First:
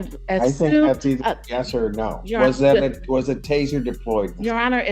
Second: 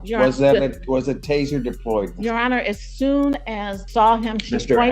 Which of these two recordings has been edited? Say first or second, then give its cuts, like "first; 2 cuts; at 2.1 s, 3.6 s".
second; 1 cut; at 3.8 s